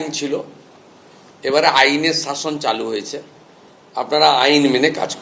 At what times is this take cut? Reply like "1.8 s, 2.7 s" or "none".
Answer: none